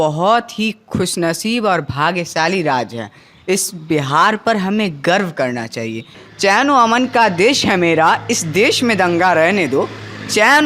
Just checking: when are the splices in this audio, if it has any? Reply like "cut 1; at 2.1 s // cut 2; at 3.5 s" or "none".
cut 1; at 6.2 s